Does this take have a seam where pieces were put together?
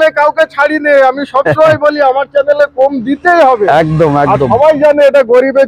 no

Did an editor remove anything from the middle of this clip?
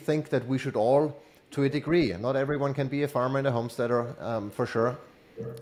no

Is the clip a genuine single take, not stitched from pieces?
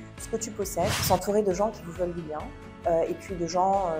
no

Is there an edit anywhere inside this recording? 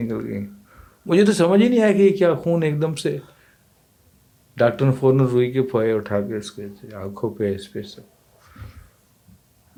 no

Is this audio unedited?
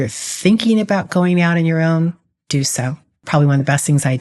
no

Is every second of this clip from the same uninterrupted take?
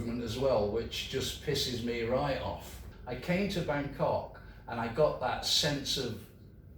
no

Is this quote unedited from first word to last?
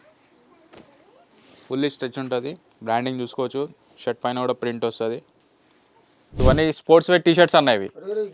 no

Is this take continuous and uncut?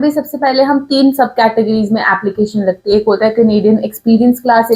yes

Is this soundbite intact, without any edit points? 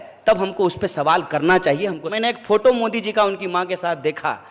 no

